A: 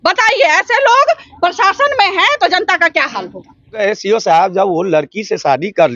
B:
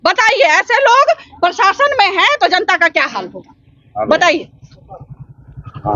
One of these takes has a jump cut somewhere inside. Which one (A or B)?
A